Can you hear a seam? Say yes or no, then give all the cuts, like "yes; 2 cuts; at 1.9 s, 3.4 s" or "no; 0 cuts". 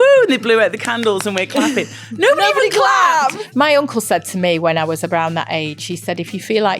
yes; 1 cut; at 3.4 s